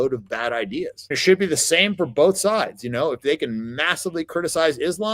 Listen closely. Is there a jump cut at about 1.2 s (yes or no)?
yes